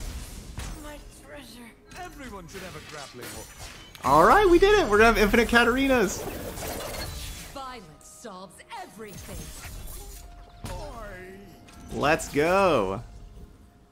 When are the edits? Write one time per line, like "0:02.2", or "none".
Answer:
none